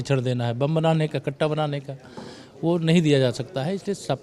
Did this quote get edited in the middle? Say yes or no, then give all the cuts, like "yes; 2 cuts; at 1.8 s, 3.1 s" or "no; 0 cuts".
no; 0 cuts